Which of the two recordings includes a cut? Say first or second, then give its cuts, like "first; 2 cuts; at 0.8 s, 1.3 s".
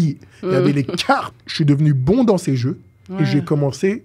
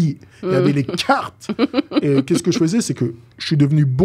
first; 1 cut; at 1.4 s